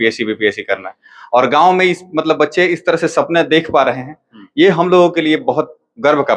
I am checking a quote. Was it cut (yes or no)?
no